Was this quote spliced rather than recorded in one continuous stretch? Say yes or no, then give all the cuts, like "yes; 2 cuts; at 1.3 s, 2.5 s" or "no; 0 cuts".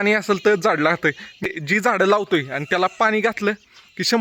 yes; 1 cut; at 1.4 s